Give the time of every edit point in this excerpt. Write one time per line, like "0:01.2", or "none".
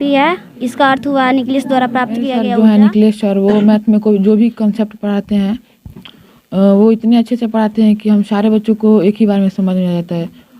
0:02.4